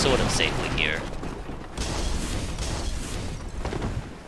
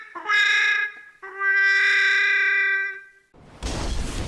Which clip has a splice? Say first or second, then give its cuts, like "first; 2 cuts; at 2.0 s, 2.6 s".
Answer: second; 1 cut; at 3.2 s